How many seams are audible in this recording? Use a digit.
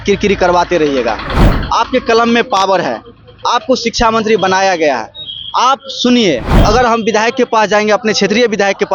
1